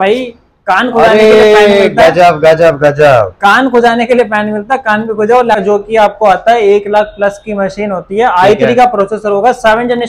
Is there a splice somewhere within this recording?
yes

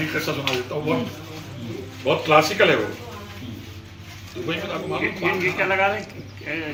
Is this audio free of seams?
yes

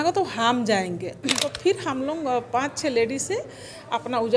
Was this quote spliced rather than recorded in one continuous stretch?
yes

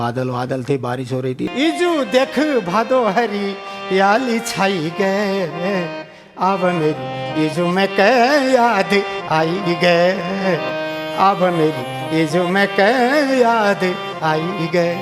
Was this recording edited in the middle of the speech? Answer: yes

